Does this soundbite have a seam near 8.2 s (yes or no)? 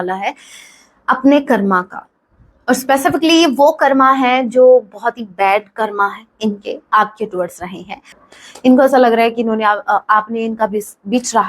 yes